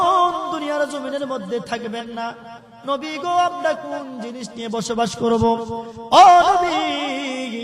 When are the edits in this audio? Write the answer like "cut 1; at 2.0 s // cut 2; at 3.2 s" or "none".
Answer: none